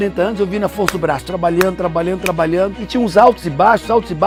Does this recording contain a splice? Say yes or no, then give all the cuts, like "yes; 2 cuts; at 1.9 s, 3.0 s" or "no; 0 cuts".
no; 0 cuts